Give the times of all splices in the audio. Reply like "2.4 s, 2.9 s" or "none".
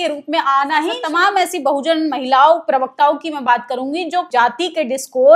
1.0 s, 4.3 s